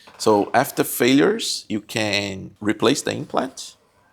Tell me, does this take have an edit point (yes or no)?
yes